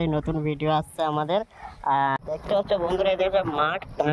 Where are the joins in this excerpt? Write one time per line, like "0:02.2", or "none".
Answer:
0:02.2